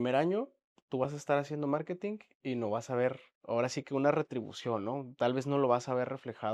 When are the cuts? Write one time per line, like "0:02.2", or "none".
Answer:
0:02.3
0:03.3